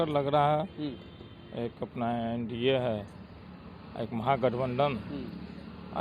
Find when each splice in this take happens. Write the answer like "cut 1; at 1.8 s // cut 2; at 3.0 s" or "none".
none